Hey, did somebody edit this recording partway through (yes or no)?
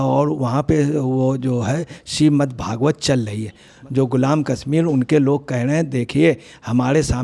yes